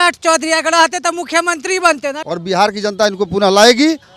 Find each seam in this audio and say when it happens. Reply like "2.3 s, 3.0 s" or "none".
2.2 s